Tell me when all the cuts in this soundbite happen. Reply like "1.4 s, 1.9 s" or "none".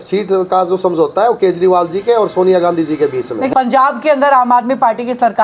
3.5 s